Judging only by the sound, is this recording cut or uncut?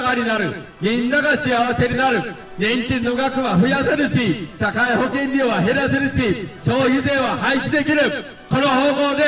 uncut